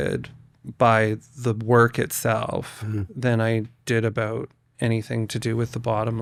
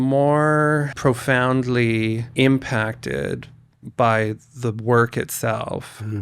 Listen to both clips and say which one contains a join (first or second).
second